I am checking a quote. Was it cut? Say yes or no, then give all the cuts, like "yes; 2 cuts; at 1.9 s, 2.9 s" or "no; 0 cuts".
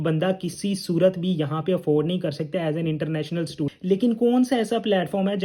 yes; 1 cut; at 3.7 s